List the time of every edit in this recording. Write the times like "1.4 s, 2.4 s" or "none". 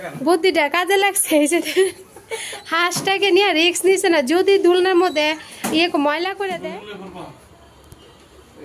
6.6 s